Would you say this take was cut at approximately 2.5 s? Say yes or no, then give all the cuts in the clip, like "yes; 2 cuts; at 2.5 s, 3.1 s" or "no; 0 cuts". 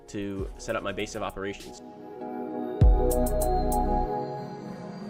no; 0 cuts